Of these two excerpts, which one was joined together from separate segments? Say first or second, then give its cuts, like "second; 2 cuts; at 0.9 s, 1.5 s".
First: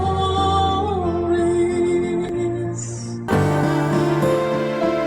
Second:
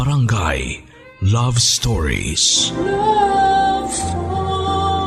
first; 1 cut; at 3.1 s